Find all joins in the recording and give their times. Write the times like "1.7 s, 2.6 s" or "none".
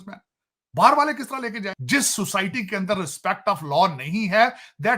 1.7 s